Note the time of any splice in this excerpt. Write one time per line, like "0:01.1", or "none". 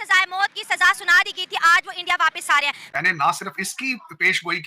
0:02.8